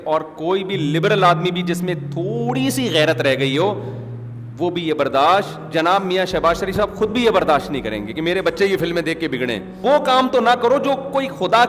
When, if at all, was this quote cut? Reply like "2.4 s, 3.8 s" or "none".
9.8 s

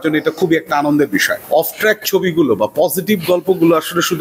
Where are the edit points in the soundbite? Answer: 1.3 s

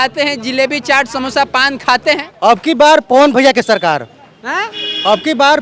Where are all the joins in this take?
2.3 s

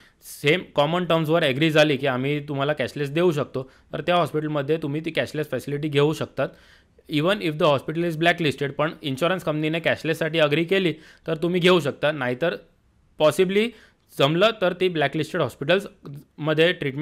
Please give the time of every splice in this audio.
none

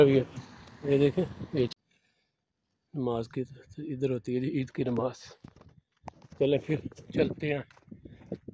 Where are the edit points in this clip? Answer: 1.7 s

